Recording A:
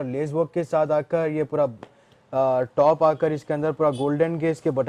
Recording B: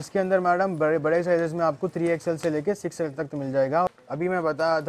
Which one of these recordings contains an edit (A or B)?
B